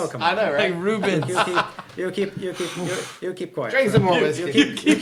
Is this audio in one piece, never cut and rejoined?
yes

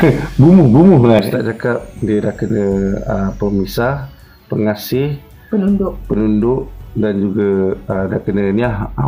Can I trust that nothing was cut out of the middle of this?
no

